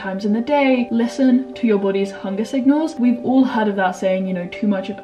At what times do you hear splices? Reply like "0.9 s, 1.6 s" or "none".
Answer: 0.9 s, 2.9 s